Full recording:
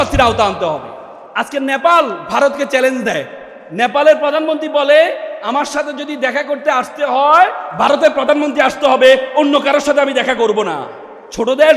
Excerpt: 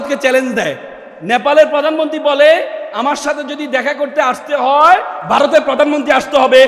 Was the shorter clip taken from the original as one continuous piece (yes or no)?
yes